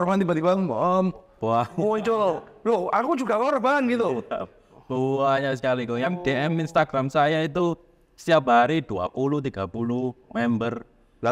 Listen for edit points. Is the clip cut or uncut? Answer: uncut